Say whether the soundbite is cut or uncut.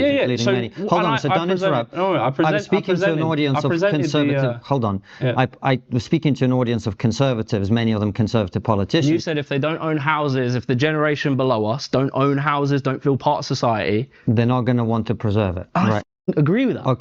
uncut